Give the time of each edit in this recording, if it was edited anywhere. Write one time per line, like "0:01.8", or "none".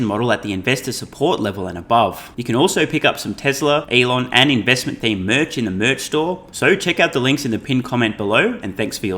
0:02.3
0:03.9
0:06.5